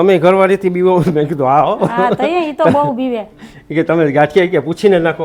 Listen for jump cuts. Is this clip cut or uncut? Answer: uncut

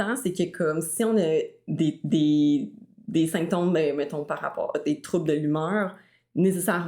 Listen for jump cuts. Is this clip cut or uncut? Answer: uncut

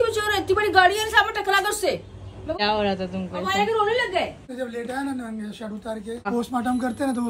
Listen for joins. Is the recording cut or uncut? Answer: cut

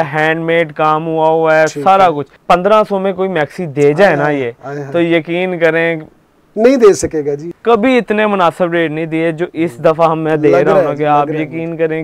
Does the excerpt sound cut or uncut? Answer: cut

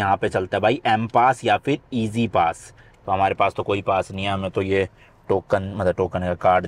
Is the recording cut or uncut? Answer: uncut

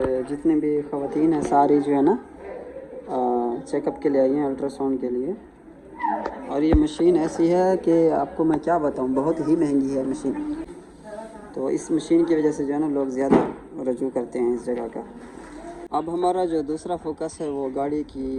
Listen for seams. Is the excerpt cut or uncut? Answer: cut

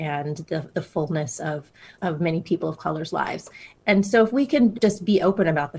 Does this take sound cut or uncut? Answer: cut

